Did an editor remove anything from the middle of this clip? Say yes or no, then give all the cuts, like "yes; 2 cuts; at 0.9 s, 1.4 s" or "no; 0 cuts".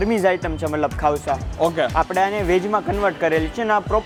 no; 0 cuts